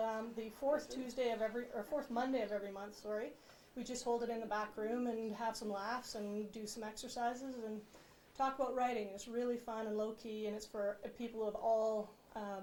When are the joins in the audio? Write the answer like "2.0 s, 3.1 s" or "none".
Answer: none

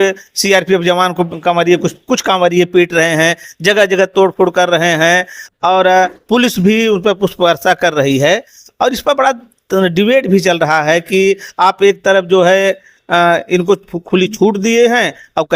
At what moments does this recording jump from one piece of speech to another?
none

